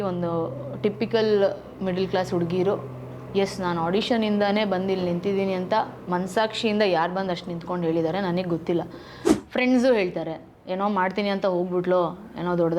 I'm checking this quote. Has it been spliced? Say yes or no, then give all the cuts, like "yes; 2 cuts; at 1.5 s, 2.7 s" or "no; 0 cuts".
yes; 1 cut; at 9.3 s